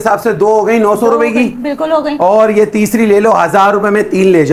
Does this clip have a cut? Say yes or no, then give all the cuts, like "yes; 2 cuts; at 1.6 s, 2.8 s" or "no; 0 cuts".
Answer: no; 0 cuts